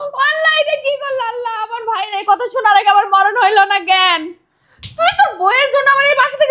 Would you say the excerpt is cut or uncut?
uncut